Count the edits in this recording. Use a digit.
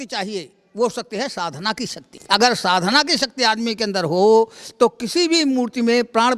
1